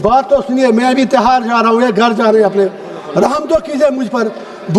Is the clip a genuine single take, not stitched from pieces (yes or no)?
yes